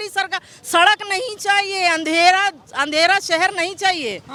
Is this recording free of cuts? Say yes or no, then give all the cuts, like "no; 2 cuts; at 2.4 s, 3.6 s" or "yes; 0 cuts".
yes; 0 cuts